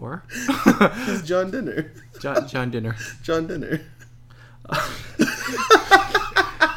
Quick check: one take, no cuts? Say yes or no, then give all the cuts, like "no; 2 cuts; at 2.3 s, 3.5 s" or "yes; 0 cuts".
yes; 0 cuts